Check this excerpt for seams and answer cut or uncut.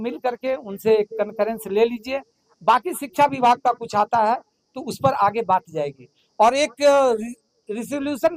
uncut